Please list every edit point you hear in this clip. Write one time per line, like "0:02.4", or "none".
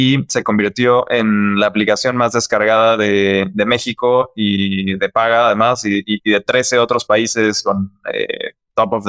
none